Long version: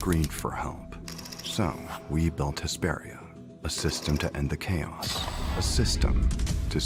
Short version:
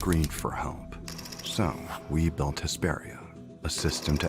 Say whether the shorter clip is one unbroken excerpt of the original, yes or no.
yes